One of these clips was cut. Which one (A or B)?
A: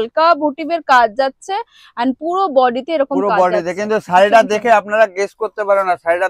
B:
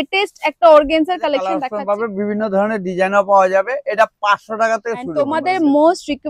B